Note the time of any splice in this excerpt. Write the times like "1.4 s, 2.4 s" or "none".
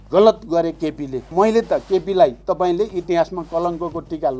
1.3 s